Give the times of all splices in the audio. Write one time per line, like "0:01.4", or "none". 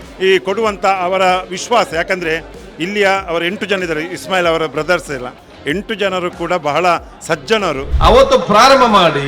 0:07.9